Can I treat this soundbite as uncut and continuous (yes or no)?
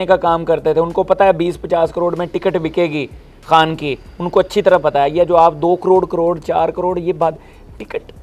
yes